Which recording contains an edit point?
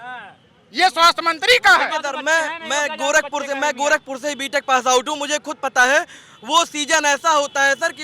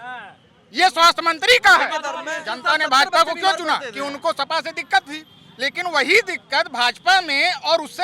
second; 1 cut; at 2.2 s

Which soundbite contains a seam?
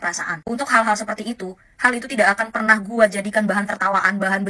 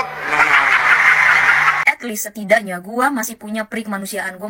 second; 1 cut; at 1.8 s

